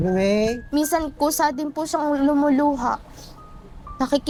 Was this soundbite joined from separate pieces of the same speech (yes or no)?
no